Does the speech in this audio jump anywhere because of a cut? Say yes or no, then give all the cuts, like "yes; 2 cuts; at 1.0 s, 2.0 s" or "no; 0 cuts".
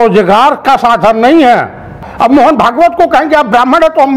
yes; 1 cut; at 2.1 s